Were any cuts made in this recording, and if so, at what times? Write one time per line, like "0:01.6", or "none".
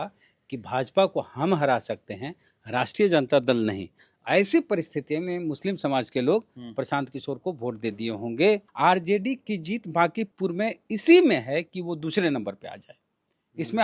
0:08.7
0:10.3